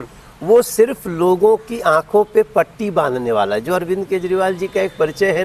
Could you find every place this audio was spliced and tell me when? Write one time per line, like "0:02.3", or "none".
none